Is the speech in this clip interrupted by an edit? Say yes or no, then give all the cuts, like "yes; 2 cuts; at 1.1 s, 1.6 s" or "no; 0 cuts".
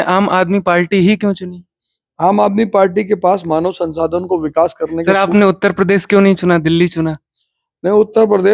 yes; 1 cut; at 5.0 s